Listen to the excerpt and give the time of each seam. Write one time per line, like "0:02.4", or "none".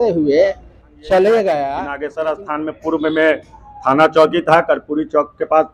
0:01.9